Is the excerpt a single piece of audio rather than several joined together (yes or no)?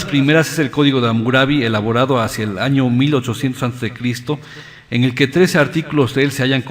no